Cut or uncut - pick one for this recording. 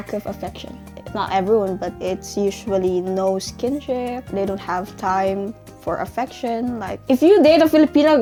uncut